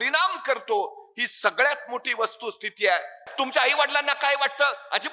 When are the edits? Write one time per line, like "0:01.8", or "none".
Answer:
0:03.2